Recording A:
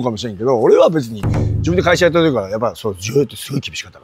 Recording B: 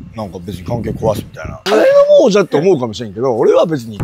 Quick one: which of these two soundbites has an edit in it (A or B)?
B